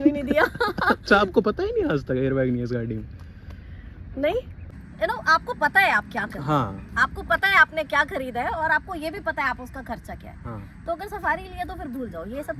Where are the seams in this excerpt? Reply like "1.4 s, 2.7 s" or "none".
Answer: 4.6 s